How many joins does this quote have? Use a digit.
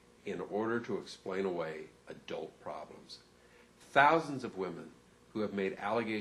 0